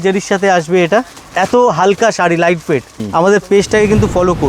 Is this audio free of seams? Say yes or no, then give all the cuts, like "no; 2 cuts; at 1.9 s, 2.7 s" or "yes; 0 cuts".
no; 2 cuts; at 1.1 s, 3.0 s